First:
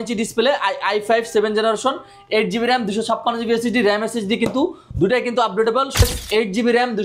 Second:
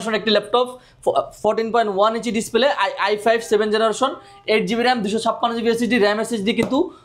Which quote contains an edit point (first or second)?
first